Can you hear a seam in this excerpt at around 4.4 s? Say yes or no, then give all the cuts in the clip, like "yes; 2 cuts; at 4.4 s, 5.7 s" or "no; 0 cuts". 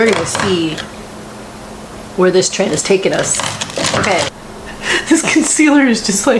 yes; 1 cut; at 4.4 s